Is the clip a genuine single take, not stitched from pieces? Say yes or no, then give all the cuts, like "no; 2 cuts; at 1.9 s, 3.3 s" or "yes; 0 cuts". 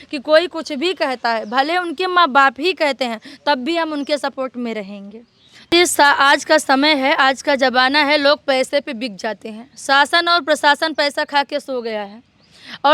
no; 1 cut; at 5.7 s